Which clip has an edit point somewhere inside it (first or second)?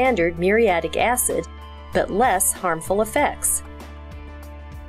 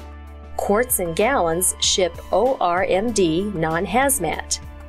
first